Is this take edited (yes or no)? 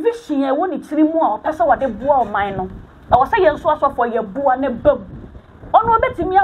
no